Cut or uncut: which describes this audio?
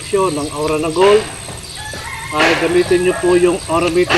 uncut